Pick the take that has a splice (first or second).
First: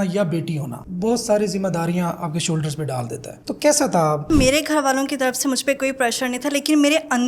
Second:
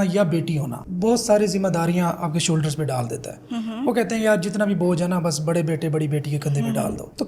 first